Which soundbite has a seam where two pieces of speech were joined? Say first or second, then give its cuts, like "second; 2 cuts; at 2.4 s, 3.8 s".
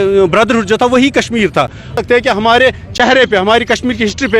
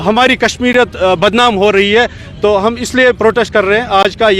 first; 1 cut; at 2.0 s